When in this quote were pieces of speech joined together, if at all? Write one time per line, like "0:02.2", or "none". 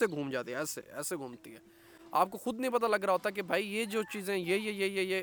none